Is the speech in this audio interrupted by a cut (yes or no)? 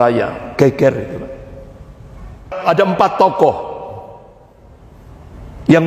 yes